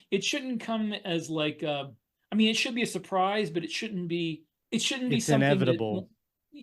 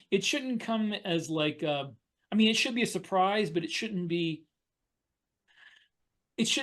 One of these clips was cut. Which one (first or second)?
first